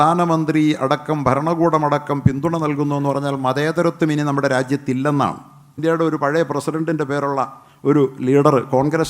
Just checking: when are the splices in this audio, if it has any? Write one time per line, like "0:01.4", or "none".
0:05.8